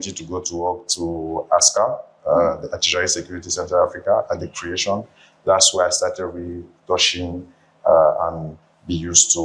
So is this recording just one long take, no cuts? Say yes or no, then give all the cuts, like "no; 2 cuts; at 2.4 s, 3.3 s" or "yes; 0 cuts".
yes; 0 cuts